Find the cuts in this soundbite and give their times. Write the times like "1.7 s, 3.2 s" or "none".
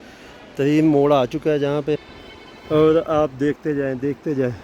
2.2 s